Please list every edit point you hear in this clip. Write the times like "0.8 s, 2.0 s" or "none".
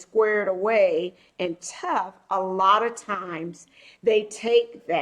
none